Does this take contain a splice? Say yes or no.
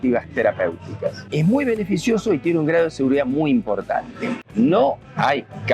yes